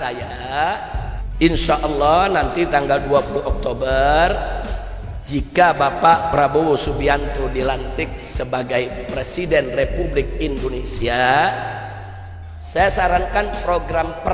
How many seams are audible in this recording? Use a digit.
1